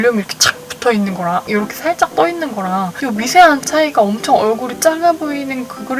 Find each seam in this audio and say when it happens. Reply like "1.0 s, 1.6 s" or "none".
1.4 s, 2.9 s